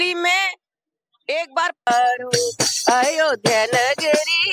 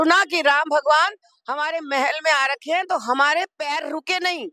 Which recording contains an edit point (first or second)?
first